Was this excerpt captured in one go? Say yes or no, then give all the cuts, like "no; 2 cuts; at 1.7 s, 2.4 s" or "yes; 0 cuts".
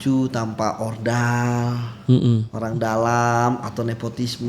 yes; 0 cuts